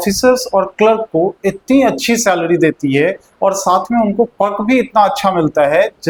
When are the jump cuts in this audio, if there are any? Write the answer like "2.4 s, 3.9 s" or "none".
none